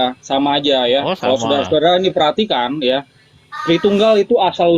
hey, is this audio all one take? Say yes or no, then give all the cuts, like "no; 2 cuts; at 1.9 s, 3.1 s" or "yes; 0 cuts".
yes; 0 cuts